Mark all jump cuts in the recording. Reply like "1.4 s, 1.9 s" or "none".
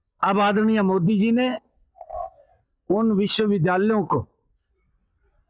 none